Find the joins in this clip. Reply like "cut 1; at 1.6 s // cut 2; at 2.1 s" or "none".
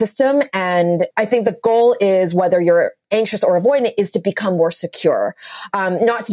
cut 1; at 1.1 s

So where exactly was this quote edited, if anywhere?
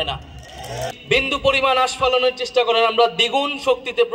cut 1; at 0.9 s

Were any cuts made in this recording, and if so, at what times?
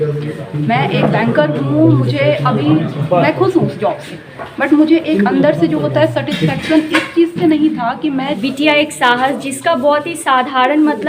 cut 1; at 8.3 s

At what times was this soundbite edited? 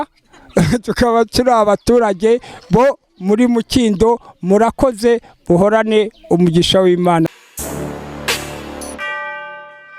cut 1; at 7.3 s

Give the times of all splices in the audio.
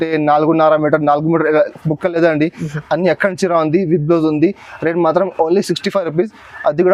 none

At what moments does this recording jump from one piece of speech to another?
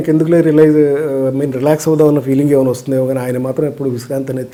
none

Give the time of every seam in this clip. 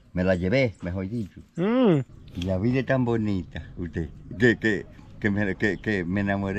cut 1; at 2.2 s

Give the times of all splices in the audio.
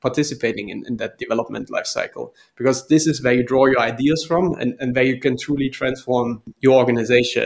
cut 1; at 6.5 s

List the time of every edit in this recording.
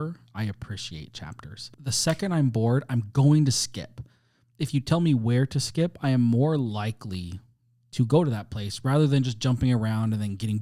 none

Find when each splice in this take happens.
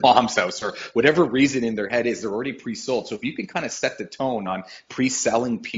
none

